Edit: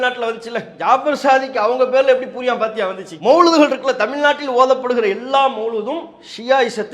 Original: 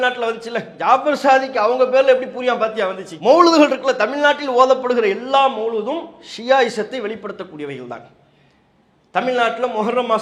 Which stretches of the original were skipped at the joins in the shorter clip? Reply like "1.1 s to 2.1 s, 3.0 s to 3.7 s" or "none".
none